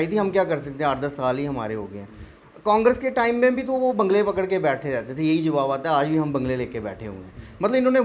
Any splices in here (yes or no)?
no